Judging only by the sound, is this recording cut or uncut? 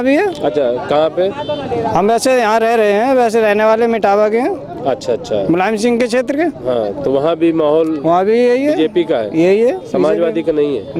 uncut